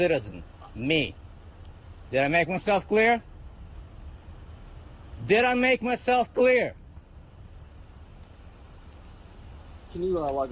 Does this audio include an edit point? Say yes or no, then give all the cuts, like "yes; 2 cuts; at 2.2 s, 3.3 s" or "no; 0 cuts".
no; 0 cuts